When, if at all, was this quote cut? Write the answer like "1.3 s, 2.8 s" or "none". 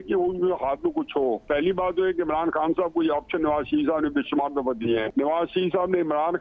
5.1 s

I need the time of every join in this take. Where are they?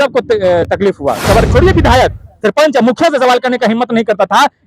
1.5 s

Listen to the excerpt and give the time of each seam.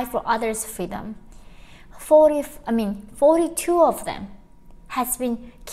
none

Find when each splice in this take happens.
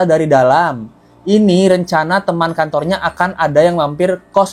none

